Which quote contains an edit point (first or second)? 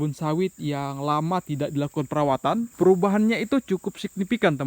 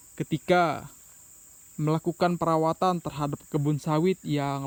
first